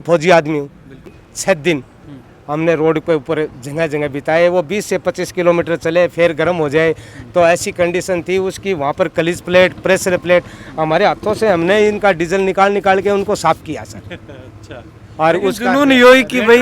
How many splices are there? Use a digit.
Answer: 1